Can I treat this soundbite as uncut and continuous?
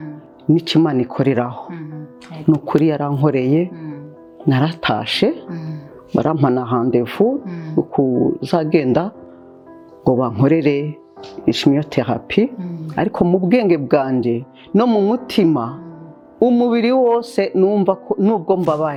yes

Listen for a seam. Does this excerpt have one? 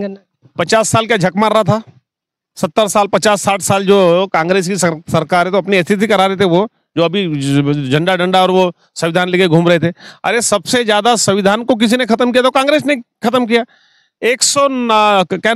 no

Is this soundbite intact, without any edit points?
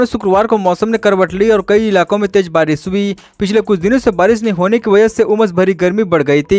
yes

